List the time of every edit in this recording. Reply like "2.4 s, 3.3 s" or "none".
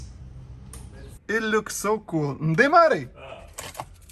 1.2 s